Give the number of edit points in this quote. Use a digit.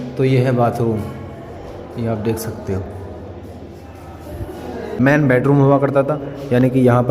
1